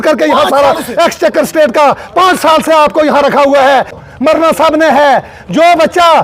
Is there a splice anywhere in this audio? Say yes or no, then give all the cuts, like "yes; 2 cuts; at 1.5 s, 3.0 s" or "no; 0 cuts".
yes; 1 cut; at 4.0 s